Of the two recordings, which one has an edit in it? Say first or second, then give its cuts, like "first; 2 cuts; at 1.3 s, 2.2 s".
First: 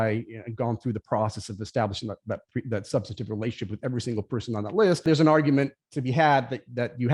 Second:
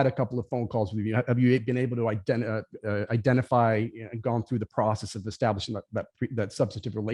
first; 1 cut; at 5.0 s